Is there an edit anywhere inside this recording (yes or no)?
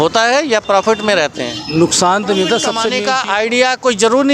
yes